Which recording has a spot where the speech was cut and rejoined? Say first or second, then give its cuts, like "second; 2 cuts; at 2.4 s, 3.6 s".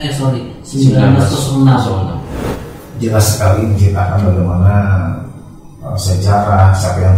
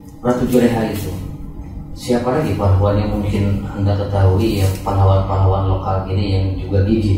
first; 1 cut; at 2.4 s